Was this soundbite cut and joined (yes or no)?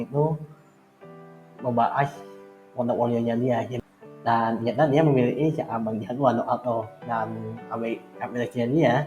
yes